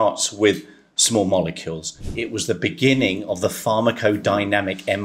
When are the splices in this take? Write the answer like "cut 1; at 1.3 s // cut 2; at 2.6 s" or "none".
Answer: cut 1; at 2.2 s